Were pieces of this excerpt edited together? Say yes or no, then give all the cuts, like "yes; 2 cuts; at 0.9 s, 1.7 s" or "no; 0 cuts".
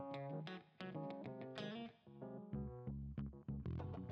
no; 0 cuts